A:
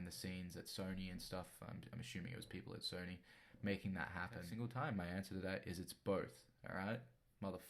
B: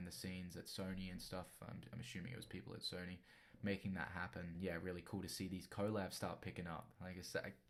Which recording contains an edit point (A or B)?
A